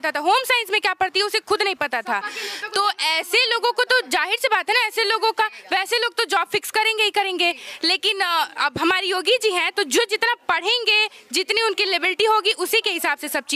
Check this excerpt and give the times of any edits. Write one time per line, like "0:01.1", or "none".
none

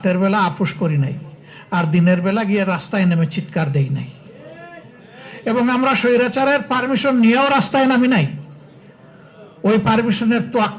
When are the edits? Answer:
none

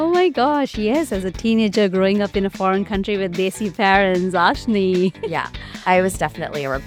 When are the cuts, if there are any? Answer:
none

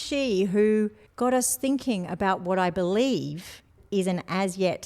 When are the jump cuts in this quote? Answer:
0:01.0

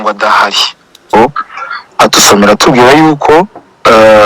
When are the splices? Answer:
0:01.1

